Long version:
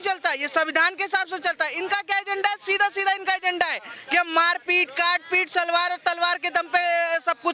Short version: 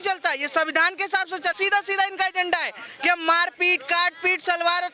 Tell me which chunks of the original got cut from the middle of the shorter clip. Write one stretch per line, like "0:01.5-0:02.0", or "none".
0:01.6-0:02.6